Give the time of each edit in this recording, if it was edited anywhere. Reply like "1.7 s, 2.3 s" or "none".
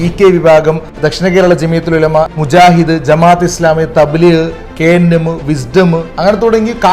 0.9 s, 2.3 s